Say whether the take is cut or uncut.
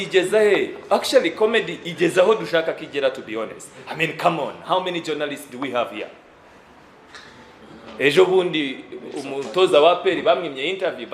uncut